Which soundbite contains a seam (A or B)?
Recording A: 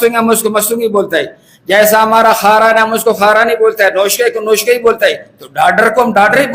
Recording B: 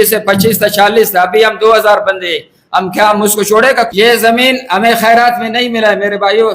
B